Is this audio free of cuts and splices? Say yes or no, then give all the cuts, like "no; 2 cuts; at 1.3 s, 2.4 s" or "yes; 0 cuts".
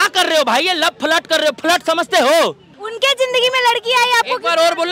no; 1 cut; at 2.8 s